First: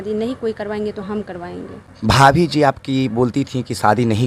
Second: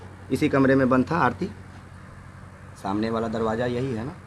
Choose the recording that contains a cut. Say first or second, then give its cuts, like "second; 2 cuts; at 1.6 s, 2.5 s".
first; 1 cut; at 1.8 s